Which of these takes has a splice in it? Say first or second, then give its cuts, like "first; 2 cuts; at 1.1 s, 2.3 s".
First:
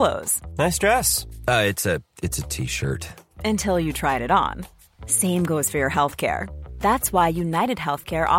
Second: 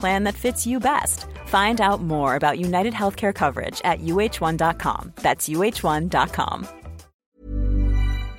second; 1 cut; at 7.3 s